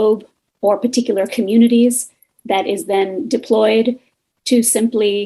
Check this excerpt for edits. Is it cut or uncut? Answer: uncut